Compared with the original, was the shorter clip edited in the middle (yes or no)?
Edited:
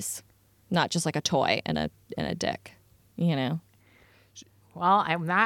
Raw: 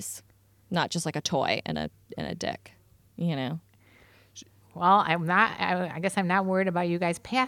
no